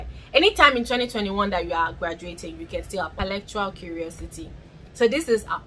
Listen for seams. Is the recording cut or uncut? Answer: cut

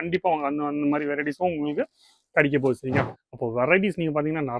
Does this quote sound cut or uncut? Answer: cut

